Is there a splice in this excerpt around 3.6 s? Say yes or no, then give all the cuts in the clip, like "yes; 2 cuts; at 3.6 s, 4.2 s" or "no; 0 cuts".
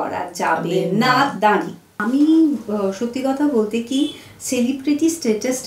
no; 1 cut; at 2.0 s